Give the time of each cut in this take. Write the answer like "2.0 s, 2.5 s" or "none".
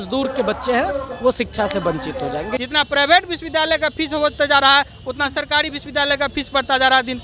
2.5 s